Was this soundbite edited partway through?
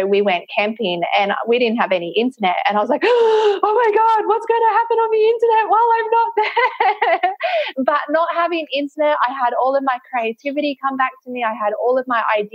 no; 0 cuts

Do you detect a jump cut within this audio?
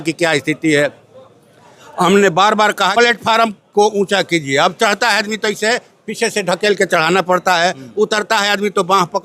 yes; 1 cut; at 2.9 s

